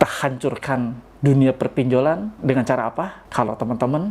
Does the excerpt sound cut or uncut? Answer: cut